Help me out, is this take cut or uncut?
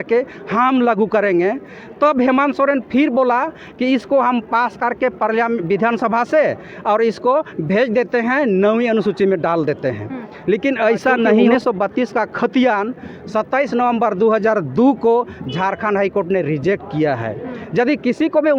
cut